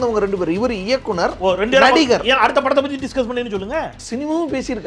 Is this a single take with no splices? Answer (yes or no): yes